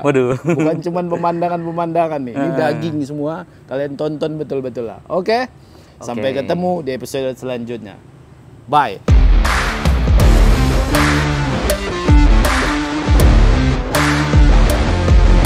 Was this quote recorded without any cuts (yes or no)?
yes